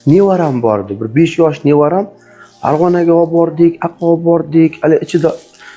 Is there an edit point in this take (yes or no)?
no